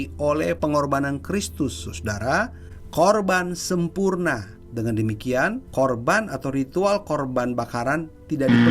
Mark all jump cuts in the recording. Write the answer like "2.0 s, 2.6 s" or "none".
4.6 s, 5.6 s